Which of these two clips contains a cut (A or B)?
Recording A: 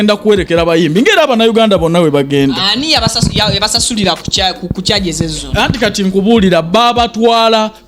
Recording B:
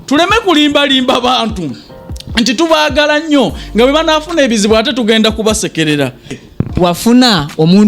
B